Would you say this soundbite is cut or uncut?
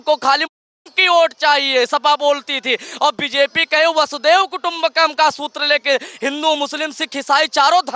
uncut